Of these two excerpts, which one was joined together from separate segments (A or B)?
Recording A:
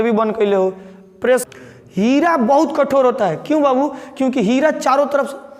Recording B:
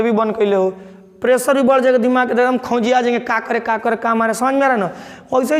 A